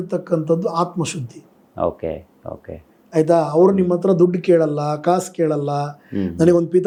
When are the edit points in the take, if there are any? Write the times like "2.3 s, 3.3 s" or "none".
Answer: none